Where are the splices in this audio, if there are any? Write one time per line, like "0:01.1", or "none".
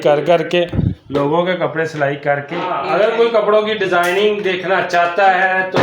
0:02.8